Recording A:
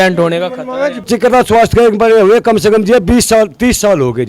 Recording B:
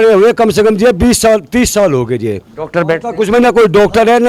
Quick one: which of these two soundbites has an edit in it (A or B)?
A